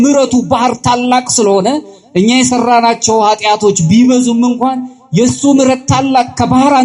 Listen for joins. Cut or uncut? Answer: uncut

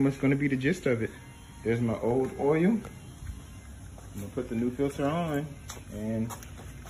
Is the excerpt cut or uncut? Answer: uncut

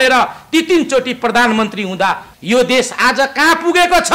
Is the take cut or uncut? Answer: cut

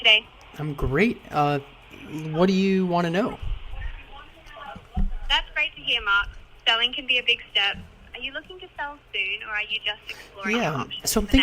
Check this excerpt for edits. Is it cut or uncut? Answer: cut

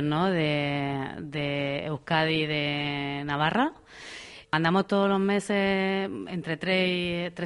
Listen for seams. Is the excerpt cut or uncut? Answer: cut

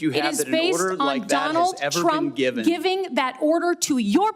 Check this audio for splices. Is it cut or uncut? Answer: uncut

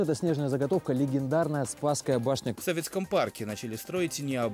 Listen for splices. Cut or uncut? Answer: uncut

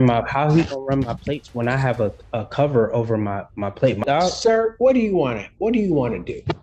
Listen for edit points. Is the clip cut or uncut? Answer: cut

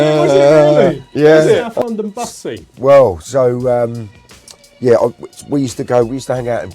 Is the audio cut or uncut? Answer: cut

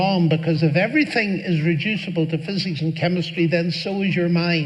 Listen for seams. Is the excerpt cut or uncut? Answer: uncut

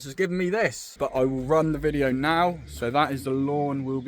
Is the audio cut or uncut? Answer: cut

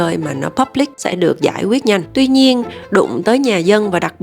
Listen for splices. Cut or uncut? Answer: cut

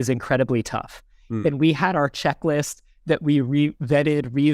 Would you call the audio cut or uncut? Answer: uncut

